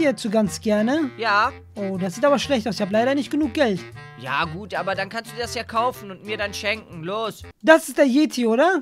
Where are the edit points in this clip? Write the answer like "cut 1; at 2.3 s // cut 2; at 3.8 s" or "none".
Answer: cut 1; at 1.6 s // cut 2; at 7.5 s